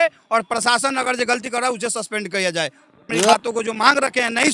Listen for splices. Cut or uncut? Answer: cut